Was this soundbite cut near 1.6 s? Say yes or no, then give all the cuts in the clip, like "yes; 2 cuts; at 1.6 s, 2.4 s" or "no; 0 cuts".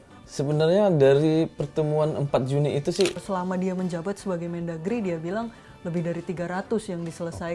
no; 1 cut; at 3.2 s